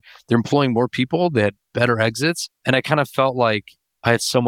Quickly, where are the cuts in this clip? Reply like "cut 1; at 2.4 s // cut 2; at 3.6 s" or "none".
cut 1; at 2.5 s